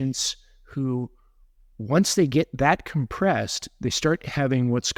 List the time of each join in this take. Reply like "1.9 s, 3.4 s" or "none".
none